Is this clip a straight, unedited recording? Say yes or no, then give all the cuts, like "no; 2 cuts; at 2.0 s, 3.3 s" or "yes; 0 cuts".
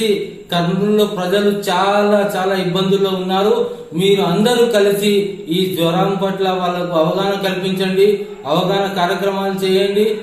yes; 0 cuts